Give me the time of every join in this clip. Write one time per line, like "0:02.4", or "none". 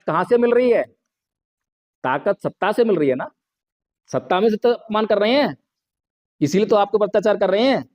0:04.8